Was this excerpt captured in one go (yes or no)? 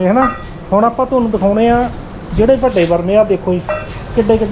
yes